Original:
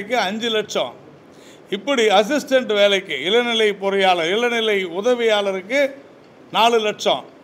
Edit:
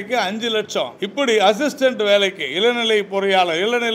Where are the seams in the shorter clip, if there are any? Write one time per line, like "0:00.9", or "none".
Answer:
0:01.0